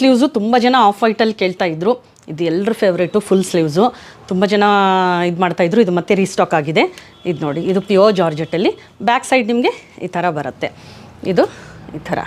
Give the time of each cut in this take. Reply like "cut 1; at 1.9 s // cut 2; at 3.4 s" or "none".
none